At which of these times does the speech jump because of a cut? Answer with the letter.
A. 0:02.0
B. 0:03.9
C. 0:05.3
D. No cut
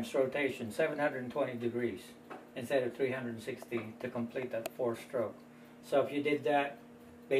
A